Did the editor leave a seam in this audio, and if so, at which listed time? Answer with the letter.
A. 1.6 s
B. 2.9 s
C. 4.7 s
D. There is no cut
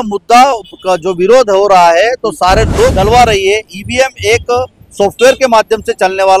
B